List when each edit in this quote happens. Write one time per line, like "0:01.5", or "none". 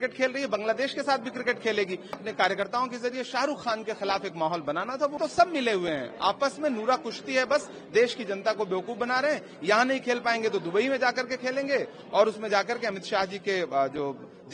0:02.2
0:05.2